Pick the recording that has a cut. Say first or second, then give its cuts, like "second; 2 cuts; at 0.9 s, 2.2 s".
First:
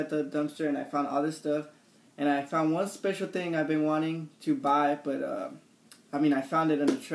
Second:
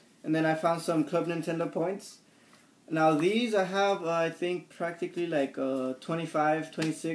second; 1 cut; at 5.8 s